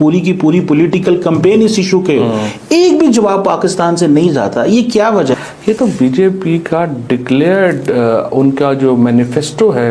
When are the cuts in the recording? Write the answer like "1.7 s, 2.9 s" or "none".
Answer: none